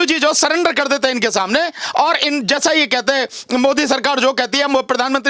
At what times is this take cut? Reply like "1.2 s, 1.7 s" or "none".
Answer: none